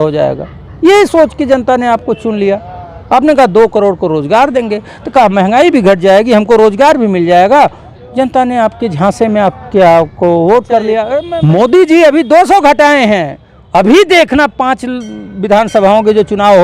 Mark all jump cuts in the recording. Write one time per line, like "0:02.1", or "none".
0:11.3